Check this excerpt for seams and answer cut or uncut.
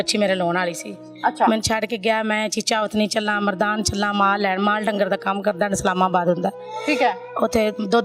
uncut